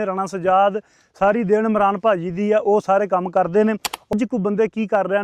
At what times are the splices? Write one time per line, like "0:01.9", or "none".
0:04.1